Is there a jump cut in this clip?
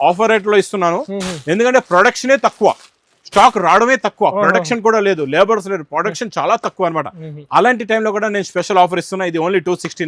no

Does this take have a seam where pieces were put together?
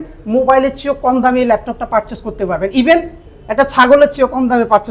no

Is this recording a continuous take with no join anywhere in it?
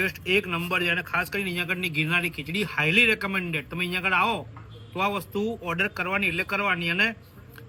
yes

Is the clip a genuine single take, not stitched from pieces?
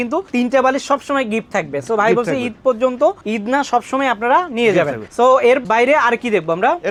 yes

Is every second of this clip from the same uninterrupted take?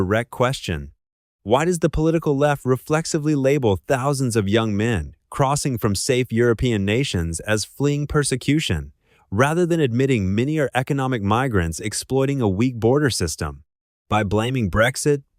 yes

